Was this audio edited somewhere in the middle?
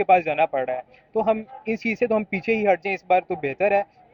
no; 0 cuts

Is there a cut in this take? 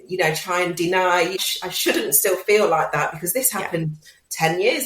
yes; 1 cut; at 1.4 s

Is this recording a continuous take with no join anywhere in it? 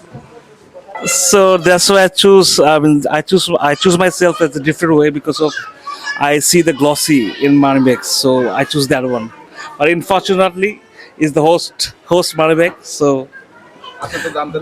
no; 1 cut; at 0.9 s

